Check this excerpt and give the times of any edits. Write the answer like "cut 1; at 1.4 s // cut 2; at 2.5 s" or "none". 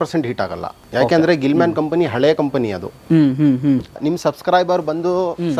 cut 1; at 3.9 s

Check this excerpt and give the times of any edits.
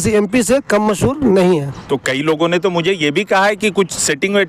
cut 1; at 1.8 s

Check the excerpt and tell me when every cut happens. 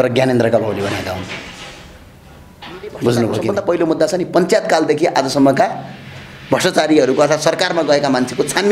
cut 1; at 3.5 s

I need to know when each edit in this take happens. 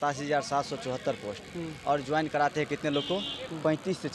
none

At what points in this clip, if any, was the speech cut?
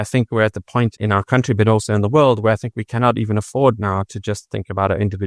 cut 1; at 1.0 s

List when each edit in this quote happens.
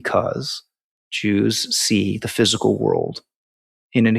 none

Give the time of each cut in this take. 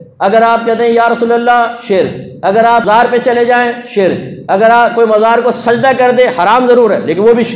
cut 1; at 2.8 s

